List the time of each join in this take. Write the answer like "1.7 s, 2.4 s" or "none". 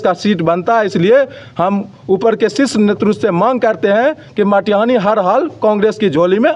none